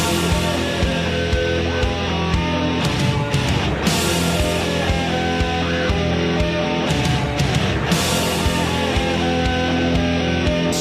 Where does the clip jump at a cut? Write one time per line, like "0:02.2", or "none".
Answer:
0:05.9